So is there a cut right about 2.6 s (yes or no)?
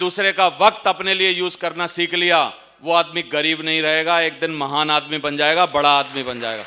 no